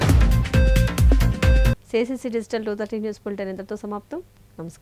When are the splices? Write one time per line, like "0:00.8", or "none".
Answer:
none